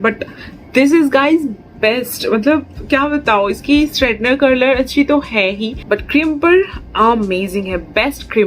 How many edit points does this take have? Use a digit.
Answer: 1